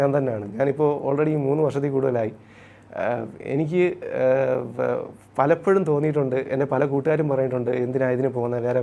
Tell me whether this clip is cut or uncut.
uncut